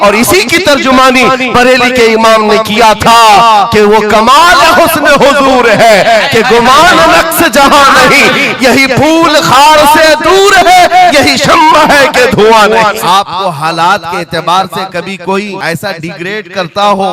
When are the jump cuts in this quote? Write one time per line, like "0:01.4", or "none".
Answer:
0:13.0
0:15.6